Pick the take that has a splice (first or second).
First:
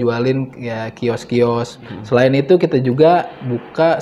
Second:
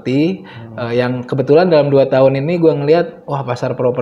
first